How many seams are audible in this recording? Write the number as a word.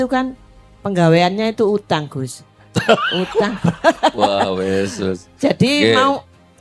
zero